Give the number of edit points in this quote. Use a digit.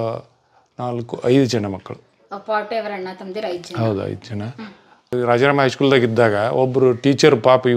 1